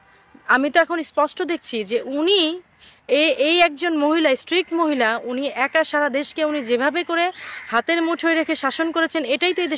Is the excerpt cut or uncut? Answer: uncut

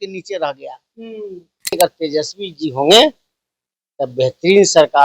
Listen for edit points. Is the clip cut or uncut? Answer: cut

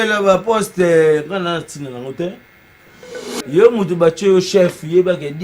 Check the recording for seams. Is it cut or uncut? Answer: cut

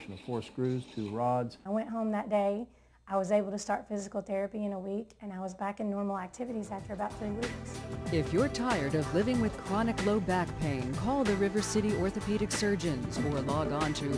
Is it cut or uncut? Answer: cut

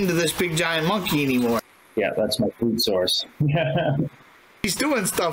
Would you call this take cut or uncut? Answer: uncut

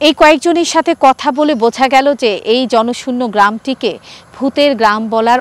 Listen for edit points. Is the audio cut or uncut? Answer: uncut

